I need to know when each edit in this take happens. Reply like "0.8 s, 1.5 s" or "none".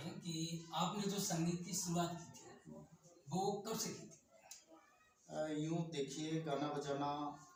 none